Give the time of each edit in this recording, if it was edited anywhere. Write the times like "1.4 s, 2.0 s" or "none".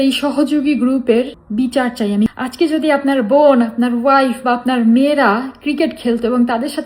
1.4 s, 2.3 s